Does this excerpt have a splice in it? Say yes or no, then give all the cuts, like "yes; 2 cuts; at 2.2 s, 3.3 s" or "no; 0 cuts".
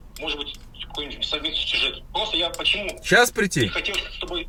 no; 0 cuts